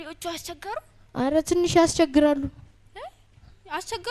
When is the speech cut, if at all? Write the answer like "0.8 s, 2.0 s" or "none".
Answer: none